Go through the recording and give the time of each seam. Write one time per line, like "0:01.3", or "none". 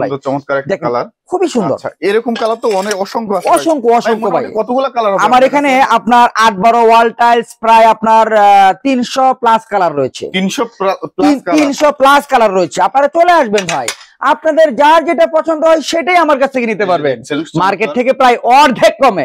none